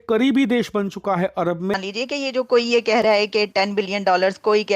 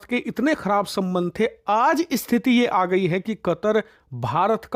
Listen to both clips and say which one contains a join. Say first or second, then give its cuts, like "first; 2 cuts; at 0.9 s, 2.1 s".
first; 1 cut; at 1.7 s